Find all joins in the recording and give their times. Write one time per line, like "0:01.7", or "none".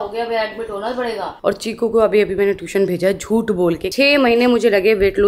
0:01.3
0:03.9